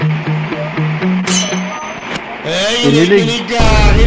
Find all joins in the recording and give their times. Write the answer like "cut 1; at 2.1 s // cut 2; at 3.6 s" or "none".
none